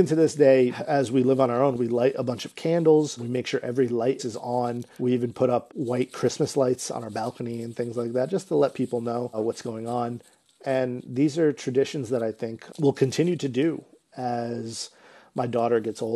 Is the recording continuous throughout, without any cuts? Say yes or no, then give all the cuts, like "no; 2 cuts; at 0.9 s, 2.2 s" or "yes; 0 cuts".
no; 5 cuts; at 0.8 s, 1.8 s, 3.2 s, 4.5 s, 5.7 s